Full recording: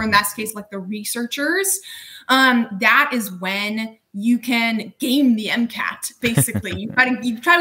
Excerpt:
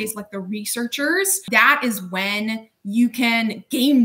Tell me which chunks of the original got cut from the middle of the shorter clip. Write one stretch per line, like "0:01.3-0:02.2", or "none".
0:01.8-0:02.7